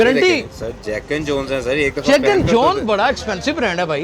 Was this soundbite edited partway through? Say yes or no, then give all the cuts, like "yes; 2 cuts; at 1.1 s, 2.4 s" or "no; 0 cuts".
no; 0 cuts